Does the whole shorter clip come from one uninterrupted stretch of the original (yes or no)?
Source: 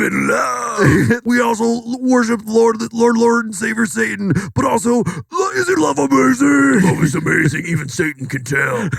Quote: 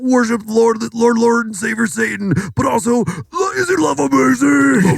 yes